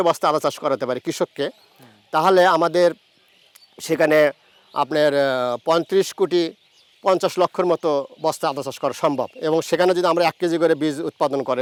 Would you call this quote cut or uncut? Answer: uncut